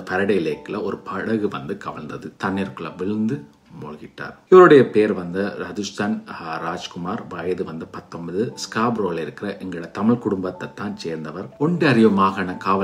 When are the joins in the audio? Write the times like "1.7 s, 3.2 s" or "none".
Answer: 2.3 s, 11.4 s